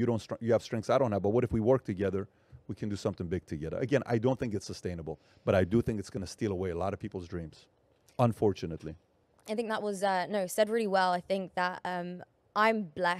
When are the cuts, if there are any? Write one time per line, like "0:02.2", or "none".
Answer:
0:01.7